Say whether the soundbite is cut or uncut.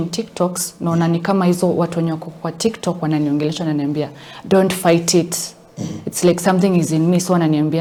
uncut